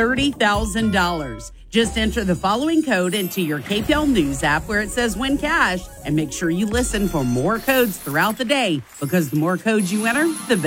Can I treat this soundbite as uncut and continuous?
yes; 0 cuts

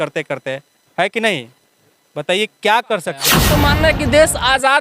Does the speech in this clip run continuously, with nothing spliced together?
no; 1 cut; at 3.5 s

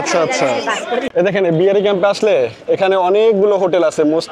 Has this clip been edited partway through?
yes; 1 cut; at 1.1 s

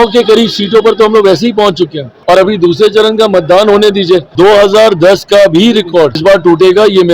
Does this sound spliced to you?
yes; 3 cuts; at 2.1 s, 4.3 s, 6.2 s

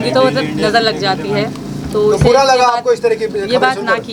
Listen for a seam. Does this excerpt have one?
no; 0 cuts

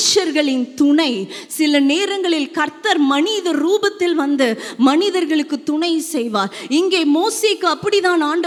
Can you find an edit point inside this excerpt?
no; 0 cuts

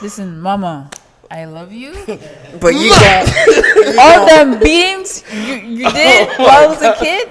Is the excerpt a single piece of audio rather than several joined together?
yes; 0 cuts

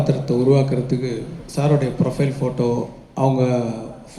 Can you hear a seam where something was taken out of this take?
yes; 1 cut; at 1.4 s

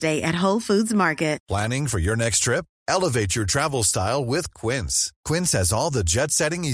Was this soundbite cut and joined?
no; 0 cuts

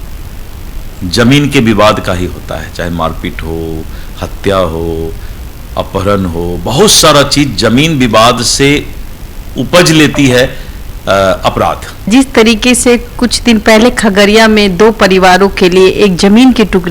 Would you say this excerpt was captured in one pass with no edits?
yes; 0 cuts

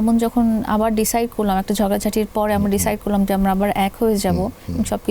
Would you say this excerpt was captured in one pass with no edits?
yes; 0 cuts

